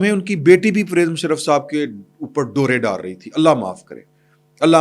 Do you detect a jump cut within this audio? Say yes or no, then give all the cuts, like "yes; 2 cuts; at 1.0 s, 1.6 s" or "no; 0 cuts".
no; 0 cuts